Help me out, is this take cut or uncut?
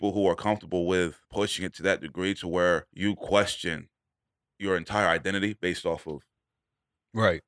cut